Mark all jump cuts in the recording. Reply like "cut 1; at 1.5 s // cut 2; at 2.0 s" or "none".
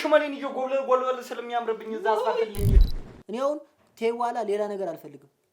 cut 1; at 2.9 s